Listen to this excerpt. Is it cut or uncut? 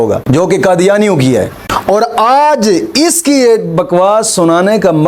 uncut